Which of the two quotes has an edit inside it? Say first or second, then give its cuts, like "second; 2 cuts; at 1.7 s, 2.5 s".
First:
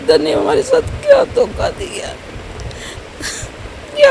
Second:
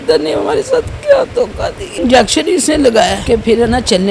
second; 2 cuts; at 1.9 s, 3.2 s